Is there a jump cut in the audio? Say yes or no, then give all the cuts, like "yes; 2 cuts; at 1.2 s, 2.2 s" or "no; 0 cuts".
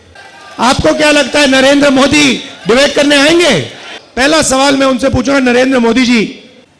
yes; 1 cut; at 4.0 s